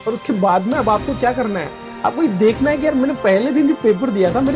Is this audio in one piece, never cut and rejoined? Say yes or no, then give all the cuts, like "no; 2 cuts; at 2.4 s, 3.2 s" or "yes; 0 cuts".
yes; 0 cuts